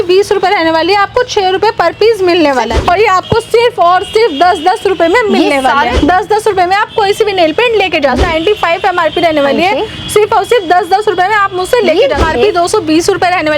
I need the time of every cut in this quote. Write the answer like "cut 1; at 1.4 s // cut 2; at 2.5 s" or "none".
cut 1; at 2.7 s // cut 2; at 5.9 s // cut 3; at 8.2 s // cut 4; at 12.2 s